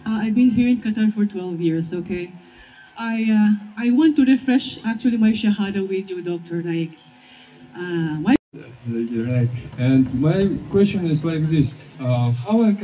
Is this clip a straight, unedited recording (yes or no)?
no